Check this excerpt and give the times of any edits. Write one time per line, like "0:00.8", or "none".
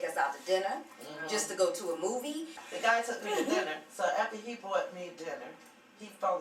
0:02.7